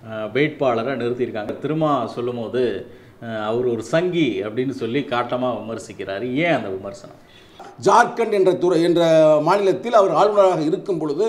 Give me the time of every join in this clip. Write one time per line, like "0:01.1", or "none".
0:01.5
0:07.7